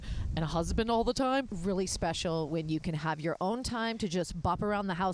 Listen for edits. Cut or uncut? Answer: cut